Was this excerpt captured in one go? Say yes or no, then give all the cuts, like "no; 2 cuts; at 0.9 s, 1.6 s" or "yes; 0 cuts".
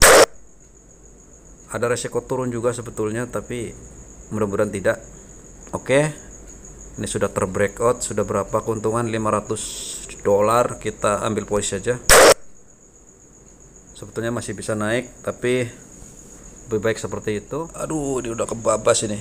no; 2 cuts; at 5.5 s, 17.5 s